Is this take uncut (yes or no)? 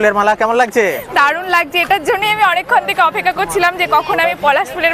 yes